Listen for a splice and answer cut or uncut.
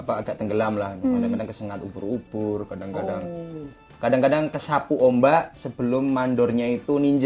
uncut